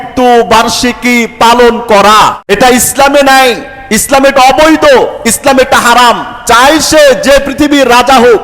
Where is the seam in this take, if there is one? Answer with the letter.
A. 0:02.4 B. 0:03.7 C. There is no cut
A